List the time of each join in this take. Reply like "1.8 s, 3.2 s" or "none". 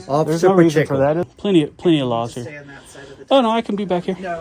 1.3 s